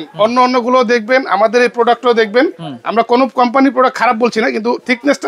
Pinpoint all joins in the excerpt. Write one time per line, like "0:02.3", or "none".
none